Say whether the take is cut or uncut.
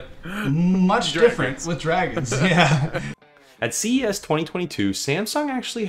cut